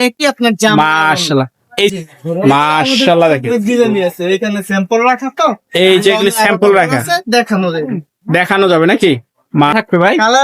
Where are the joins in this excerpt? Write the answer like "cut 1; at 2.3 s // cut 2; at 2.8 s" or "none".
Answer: cut 1; at 1.9 s // cut 2; at 9.7 s